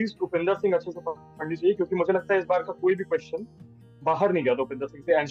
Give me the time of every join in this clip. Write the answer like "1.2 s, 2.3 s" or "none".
none

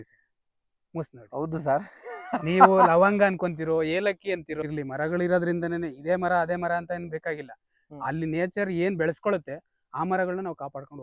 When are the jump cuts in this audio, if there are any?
4.6 s

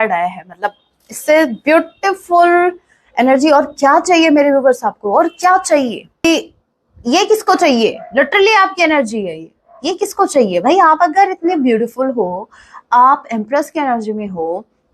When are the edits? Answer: 6.2 s

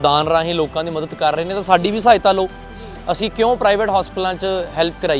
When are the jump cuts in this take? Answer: none

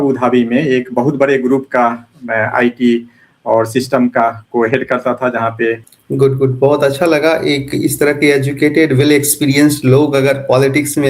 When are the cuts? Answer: 5.9 s

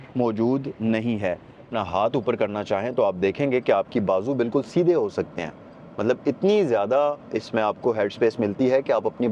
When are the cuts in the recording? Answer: 1.7 s

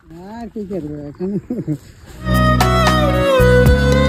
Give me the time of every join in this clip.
none

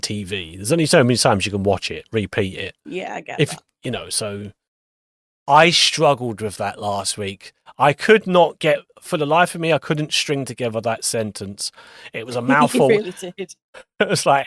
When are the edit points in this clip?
5.3 s

